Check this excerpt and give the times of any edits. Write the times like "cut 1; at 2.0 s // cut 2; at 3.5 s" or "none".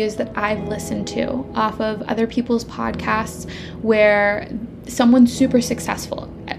none